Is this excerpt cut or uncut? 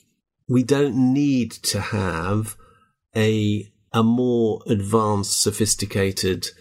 uncut